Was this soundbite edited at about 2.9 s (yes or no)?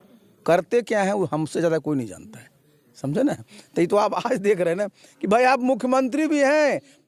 no